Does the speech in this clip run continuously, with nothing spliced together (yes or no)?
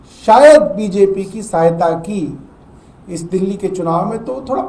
yes